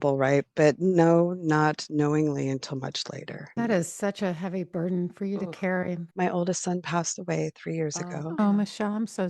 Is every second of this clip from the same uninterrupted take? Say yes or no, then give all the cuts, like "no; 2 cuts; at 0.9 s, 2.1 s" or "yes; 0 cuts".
no; 3 cuts; at 3.6 s, 6.1 s, 8.4 s